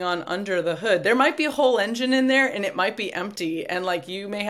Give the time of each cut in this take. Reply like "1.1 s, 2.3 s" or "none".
none